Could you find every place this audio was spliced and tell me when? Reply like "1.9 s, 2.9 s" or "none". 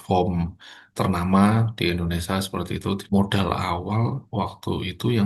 3.0 s